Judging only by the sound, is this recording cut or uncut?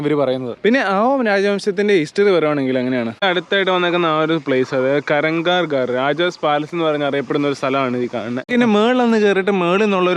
cut